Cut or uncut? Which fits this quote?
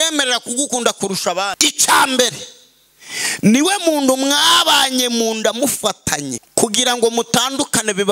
cut